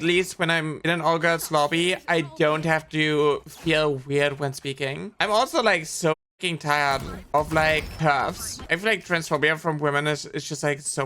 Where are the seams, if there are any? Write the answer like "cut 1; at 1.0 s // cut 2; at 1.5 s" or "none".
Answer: cut 1; at 5.1 s // cut 2; at 7.9 s